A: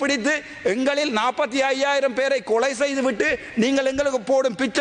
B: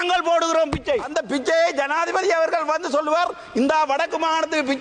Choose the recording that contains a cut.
B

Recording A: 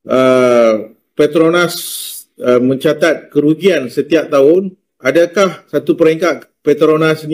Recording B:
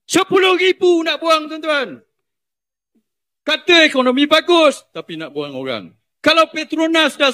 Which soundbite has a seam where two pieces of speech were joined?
B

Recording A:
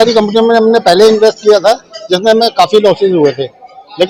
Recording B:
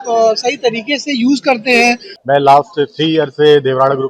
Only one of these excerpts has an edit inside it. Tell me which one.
B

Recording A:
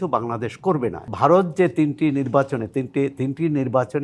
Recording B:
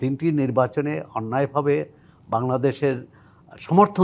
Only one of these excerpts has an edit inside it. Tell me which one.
A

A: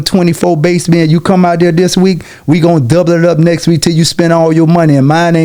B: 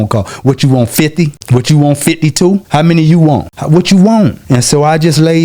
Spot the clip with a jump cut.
B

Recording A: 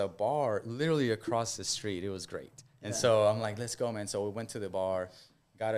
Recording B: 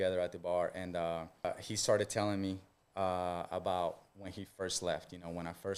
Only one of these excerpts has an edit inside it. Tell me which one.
B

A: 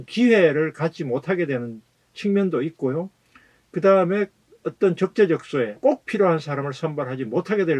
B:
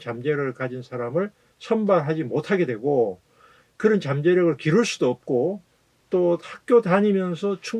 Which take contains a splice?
A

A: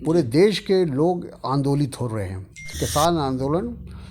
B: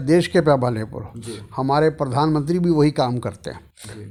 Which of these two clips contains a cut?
A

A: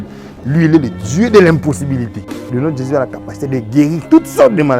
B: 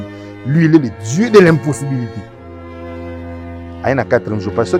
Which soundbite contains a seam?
A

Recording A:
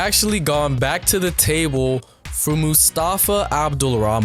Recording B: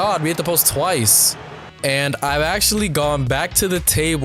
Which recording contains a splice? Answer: B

